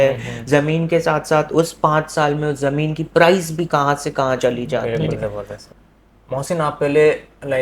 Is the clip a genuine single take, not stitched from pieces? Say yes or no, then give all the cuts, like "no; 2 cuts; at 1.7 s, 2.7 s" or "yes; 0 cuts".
no; 1 cut; at 5.6 s